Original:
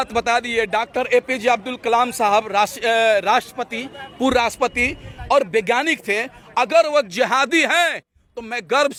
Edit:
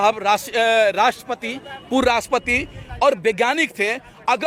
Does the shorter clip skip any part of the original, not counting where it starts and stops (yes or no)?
no